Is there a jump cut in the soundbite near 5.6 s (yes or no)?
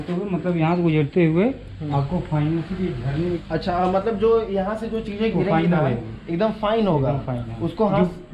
no